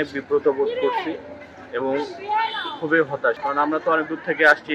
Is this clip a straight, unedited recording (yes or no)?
no